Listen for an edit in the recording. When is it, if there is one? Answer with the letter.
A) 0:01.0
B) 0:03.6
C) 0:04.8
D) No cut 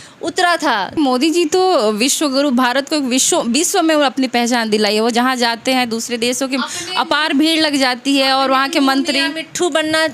A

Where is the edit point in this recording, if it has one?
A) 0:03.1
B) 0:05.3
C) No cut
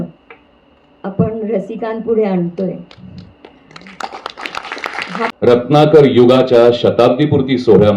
B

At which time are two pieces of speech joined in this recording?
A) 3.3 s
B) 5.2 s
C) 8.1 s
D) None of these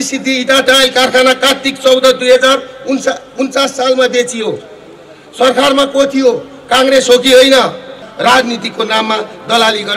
C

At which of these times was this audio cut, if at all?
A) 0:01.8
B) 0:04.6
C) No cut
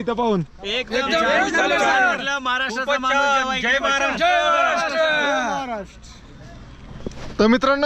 C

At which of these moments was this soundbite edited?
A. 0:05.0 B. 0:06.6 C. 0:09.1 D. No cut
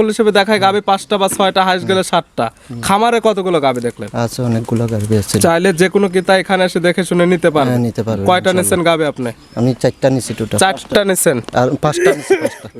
D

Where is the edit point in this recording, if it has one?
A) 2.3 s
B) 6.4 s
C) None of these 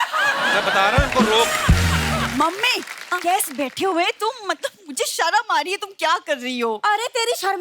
A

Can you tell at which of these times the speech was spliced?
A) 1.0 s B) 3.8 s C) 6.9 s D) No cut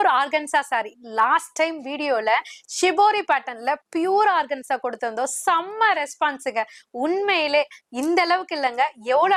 D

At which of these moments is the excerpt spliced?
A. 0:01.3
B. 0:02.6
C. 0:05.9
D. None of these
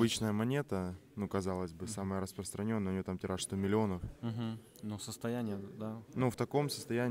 D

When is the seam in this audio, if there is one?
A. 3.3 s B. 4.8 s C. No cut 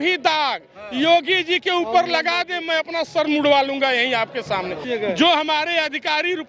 B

